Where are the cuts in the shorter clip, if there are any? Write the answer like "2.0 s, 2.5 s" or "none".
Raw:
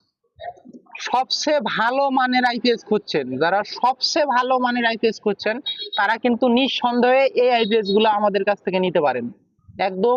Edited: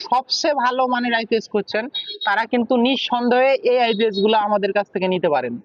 none